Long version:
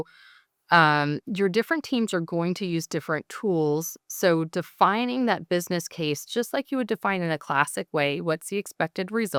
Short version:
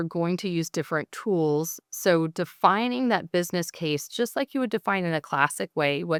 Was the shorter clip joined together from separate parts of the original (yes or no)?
no